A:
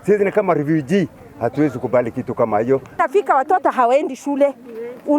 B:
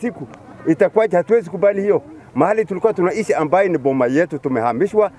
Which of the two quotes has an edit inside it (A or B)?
A